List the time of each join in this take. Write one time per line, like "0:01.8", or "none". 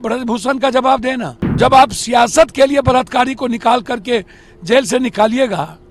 0:01.6